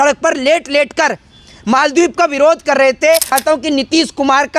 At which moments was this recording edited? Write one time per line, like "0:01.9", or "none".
0:03.3

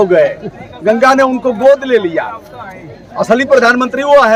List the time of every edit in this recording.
none

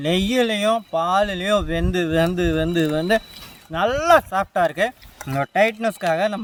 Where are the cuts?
none

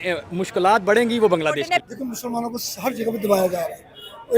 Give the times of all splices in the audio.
0:01.9

